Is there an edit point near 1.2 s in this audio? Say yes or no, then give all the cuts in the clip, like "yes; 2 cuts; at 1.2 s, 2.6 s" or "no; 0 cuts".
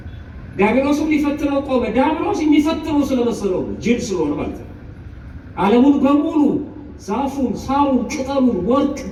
no; 0 cuts